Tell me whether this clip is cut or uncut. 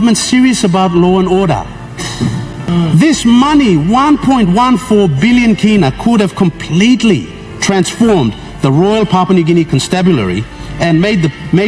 cut